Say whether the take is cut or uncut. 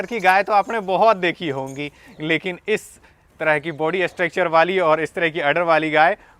uncut